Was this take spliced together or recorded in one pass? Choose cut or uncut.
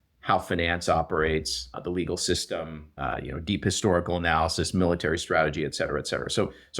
cut